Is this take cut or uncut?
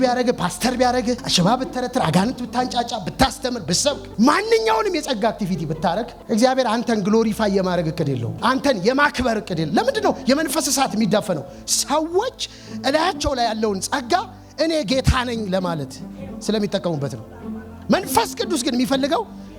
cut